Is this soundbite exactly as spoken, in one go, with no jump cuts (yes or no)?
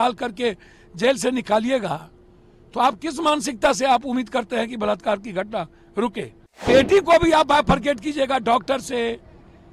no